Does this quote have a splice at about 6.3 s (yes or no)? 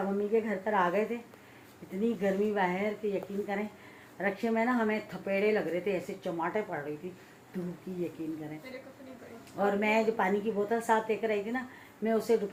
no